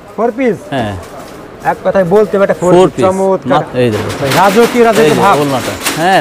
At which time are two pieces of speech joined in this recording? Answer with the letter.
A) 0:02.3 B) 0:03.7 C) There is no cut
B